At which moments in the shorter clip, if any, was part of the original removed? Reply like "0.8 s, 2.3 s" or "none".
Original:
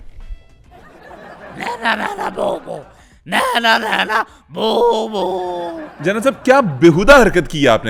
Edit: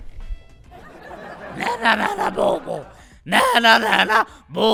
none

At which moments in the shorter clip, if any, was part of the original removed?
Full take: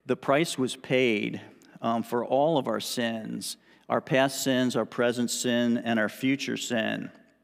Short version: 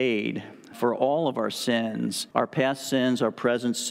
0.8 s, 2.2 s

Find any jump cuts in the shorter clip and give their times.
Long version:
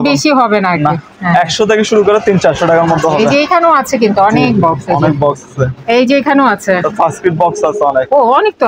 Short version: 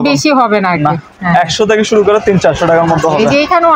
none

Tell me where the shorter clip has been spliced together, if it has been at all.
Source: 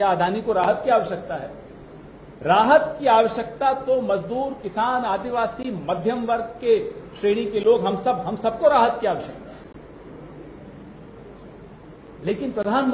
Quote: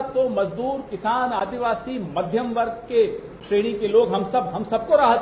none

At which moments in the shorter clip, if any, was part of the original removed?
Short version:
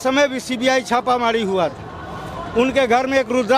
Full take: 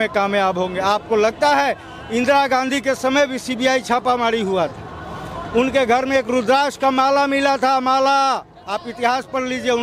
none

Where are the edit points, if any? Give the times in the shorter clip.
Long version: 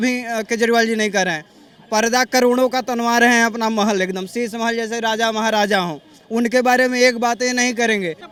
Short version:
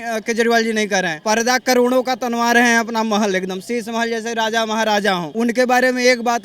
1.1 s, 5.3 s

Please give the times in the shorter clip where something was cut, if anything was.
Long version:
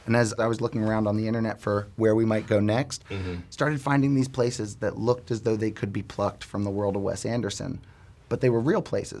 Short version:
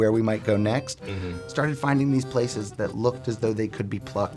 none

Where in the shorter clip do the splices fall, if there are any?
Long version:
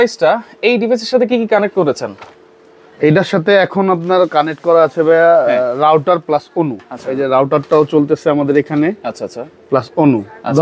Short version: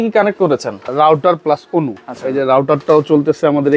0.9 s

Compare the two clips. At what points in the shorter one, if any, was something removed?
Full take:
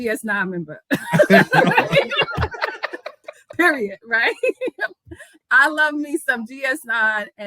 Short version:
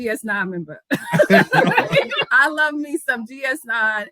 2.3 s

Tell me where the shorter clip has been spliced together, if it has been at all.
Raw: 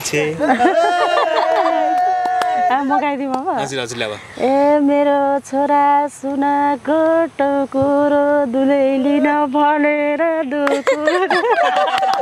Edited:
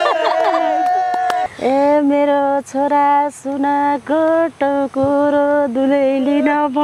1.4 s

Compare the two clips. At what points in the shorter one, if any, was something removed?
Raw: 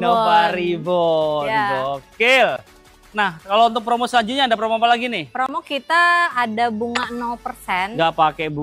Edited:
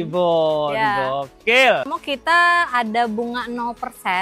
2.0 s

